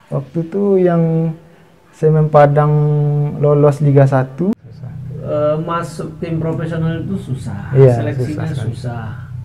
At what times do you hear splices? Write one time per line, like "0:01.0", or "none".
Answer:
0:04.5